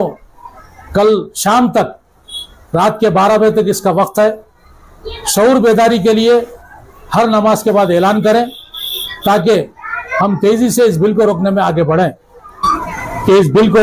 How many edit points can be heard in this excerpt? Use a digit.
1